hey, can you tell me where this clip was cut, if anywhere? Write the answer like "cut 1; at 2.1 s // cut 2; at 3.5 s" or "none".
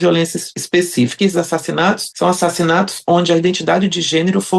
cut 1; at 0.9 s